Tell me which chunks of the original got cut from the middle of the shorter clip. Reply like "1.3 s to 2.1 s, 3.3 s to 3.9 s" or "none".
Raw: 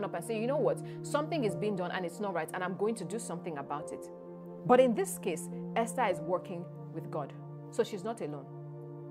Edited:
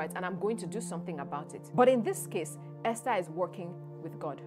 3.9 s to 4.5 s